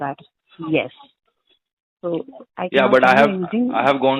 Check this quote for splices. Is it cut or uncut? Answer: uncut